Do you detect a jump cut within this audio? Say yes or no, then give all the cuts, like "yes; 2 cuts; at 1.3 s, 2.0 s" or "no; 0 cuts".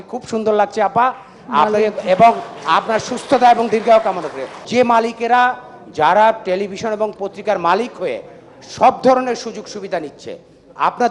yes; 1 cut; at 4.6 s